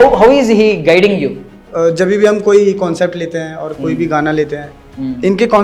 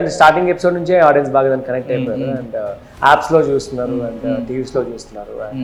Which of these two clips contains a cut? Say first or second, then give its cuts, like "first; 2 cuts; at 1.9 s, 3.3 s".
first; 1 cut; at 1.6 s